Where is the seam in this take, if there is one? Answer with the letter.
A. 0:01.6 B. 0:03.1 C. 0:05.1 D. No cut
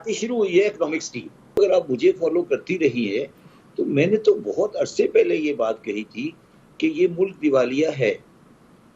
A